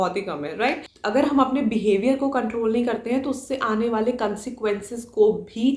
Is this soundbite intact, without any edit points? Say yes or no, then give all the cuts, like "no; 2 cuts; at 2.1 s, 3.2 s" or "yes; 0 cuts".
no; 1 cut; at 1.1 s